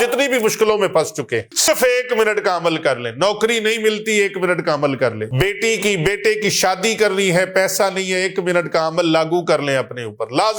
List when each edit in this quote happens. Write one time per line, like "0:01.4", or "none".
0:01.7
0:05.2